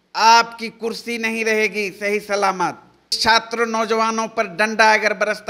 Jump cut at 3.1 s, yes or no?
yes